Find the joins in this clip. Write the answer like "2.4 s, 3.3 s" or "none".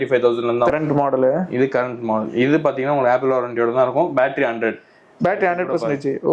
none

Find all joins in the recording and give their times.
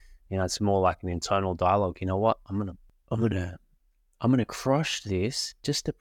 2.9 s

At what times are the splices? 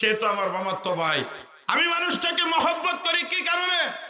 1.4 s

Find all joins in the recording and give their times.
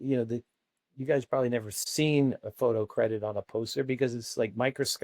1.8 s

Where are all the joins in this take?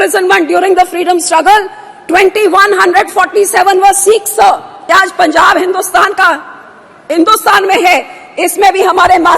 4.7 s

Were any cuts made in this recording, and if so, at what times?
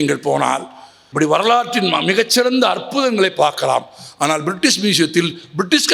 1.1 s

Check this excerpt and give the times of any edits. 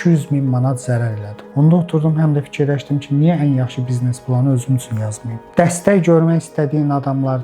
1.4 s, 5.4 s

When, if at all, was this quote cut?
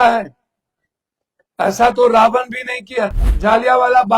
3.2 s

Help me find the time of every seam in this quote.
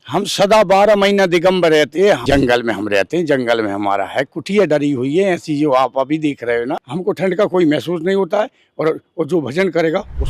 2.2 s, 6.8 s

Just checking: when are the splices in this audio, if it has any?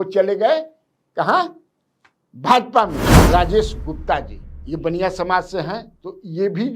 3.1 s

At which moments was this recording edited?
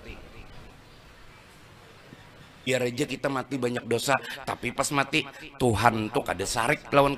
2.7 s

